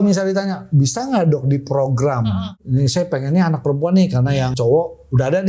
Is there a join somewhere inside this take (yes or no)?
yes